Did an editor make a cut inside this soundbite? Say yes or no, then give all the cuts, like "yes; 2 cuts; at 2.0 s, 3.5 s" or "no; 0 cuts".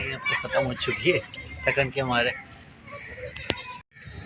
no; 0 cuts